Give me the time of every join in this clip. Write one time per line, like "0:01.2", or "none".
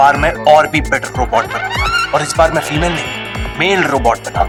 none